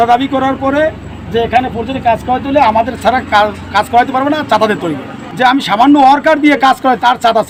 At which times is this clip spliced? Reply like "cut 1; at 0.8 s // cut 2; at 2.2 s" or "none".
none